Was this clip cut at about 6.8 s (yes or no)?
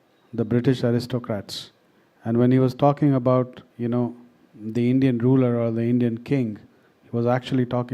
no